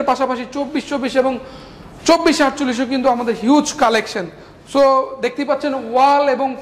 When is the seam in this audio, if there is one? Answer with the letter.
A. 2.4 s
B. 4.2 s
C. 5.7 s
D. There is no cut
D